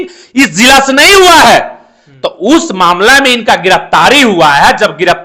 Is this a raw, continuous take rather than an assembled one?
yes; 0 cuts

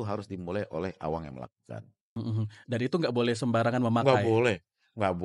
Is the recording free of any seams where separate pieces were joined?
no; 1 cut; at 2.2 s

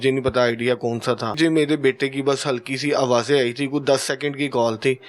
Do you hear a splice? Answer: yes; 1 cut; at 1.4 s

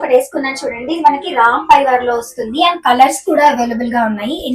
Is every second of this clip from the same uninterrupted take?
yes; 0 cuts

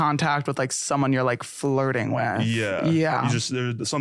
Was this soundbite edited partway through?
no; 0 cuts

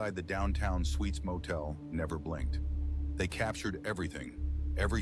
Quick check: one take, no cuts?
yes; 0 cuts

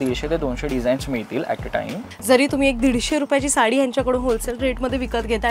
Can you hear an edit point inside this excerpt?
yes; 1 cut; at 2.1 s

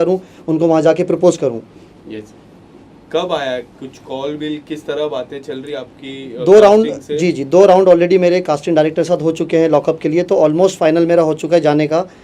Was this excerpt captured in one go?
yes; 0 cuts

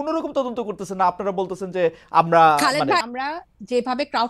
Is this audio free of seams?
no; 1 cut; at 3.0 s

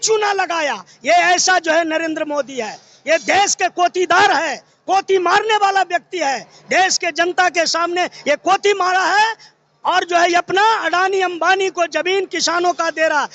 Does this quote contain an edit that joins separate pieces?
no; 0 cuts

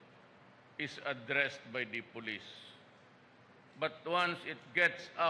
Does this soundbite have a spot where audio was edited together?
no; 0 cuts

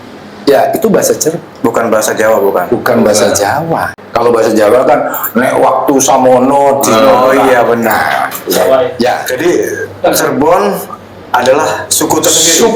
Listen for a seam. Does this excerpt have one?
yes; 2 cuts; at 4.0 s, 9.3 s

